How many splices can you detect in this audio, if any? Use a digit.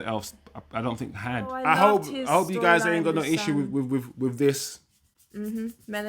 1